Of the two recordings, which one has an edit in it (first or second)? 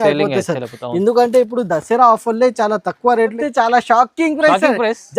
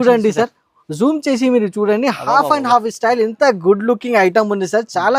first